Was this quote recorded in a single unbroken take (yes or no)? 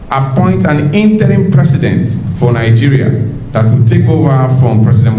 yes